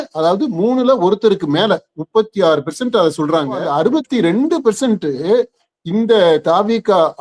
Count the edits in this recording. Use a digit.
1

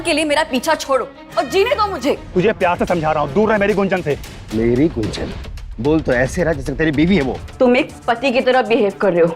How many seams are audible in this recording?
2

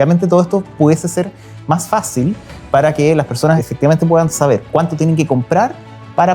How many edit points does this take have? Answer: 2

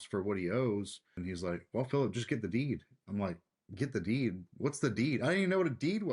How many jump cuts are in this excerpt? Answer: 1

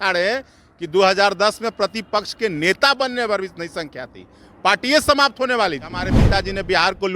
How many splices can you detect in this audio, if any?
1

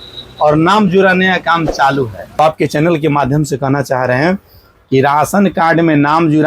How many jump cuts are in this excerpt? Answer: 1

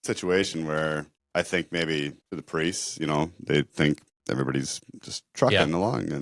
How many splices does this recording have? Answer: 3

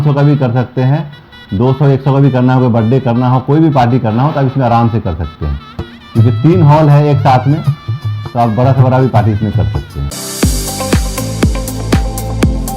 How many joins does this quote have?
1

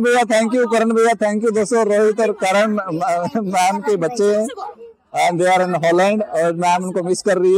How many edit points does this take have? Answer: 0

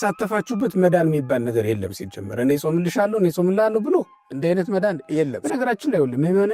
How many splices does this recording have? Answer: 1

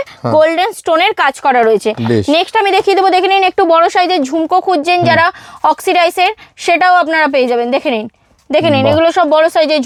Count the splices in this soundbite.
0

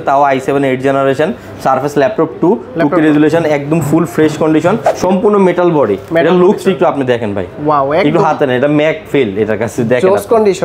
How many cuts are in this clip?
1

